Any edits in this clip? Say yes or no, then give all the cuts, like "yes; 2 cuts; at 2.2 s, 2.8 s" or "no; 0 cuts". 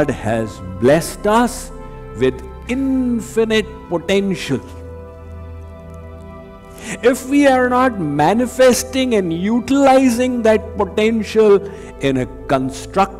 no; 0 cuts